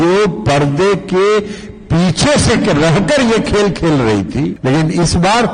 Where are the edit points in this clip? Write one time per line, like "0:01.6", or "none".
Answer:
0:04.6